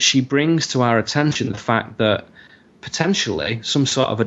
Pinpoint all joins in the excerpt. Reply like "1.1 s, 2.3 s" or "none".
2.3 s